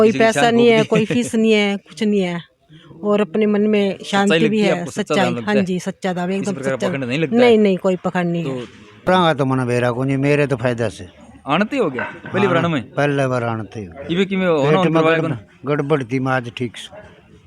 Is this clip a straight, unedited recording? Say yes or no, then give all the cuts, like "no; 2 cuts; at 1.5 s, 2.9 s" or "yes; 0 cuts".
no; 1 cut; at 9.1 s